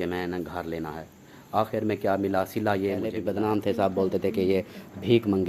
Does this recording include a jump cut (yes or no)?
yes